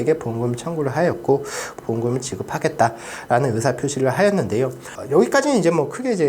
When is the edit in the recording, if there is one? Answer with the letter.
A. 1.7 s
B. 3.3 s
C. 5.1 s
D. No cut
A